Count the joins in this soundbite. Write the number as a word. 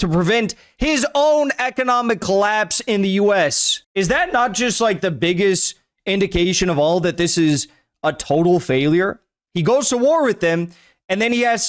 zero